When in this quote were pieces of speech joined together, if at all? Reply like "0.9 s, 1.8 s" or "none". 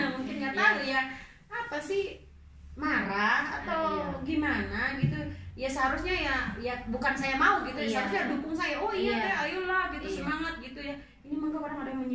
none